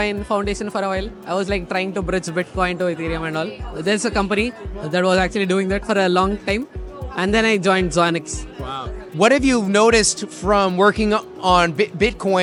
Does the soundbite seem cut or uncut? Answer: uncut